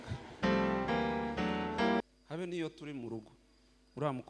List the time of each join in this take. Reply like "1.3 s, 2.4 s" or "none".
2.0 s